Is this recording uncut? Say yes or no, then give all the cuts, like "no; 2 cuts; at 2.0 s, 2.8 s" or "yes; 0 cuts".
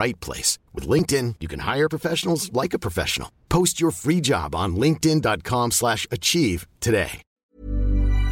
no; 1 cut; at 7.4 s